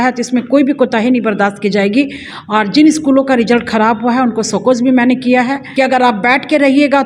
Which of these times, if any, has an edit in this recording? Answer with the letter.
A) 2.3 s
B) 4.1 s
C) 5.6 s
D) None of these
C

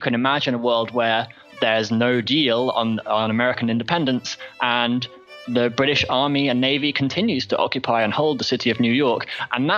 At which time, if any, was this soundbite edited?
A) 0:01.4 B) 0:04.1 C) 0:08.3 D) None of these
A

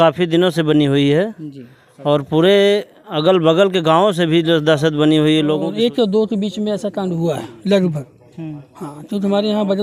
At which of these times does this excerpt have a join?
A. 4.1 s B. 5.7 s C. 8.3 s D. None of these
B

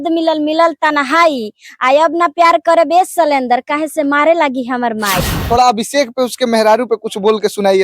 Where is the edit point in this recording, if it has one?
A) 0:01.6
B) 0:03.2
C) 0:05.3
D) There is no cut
C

